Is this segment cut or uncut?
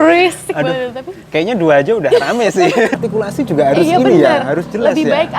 cut